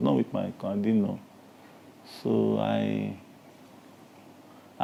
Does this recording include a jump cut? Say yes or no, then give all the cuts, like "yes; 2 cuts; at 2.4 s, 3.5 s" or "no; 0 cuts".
no; 0 cuts